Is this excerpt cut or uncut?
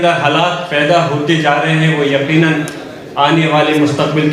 uncut